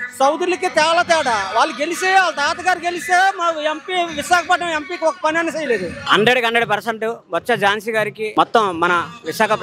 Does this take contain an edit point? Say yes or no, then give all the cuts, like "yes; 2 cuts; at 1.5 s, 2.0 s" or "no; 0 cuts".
yes; 2 cuts; at 6.0 s, 8.3 s